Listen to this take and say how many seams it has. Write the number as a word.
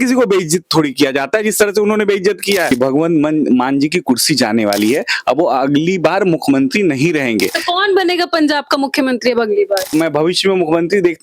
two